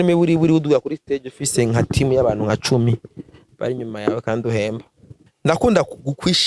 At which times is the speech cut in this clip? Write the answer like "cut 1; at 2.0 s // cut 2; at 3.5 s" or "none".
cut 1; at 5.3 s